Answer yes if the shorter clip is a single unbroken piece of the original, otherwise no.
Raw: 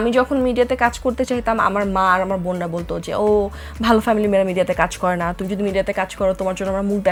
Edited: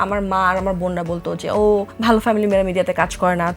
no